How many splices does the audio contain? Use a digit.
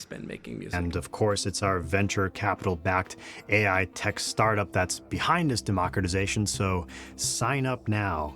1